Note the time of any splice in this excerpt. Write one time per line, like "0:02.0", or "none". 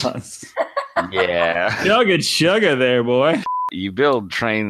0:03.8